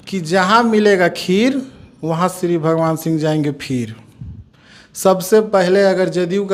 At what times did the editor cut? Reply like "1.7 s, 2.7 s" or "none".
none